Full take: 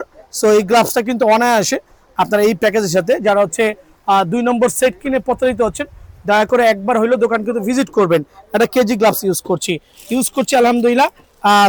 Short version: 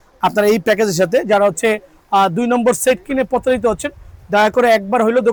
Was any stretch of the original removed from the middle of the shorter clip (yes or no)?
no